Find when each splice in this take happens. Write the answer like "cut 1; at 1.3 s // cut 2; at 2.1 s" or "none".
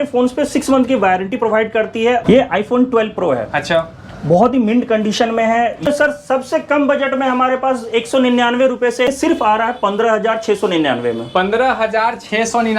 cut 1; at 2.2 s // cut 2; at 5.9 s // cut 3; at 9.1 s